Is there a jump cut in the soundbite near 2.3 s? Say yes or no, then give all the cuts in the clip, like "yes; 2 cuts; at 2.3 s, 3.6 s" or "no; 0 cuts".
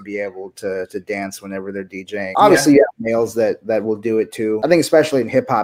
yes; 2 cuts; at 2.3 s, 4.6 s